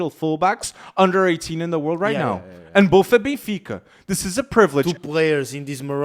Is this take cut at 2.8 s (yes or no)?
no